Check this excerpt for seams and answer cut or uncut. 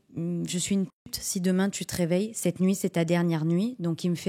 uncut